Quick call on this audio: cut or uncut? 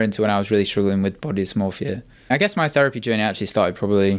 cut